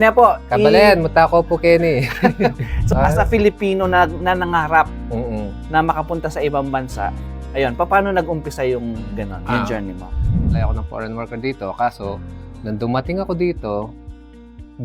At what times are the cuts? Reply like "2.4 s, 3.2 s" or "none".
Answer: 2.7 s, 10.5 s